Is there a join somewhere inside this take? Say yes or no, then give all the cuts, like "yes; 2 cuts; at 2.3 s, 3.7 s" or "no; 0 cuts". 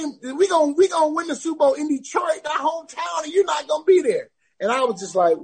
no; 0 cuts